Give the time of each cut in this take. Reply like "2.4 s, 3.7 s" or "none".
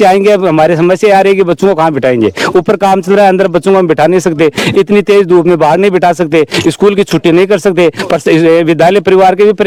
none